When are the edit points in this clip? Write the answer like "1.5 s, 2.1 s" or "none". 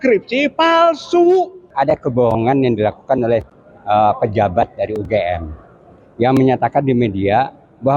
1.7 s